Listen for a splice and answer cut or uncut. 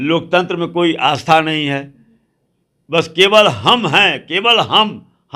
uncut